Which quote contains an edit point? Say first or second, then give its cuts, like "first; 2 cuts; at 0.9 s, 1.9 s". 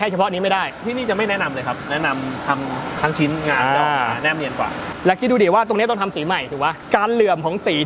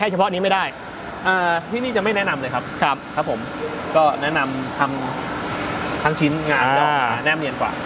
first; 5 cuts; at 0.8 s, 1.9 s, 3.0 s, 4.8 s, 6.8 s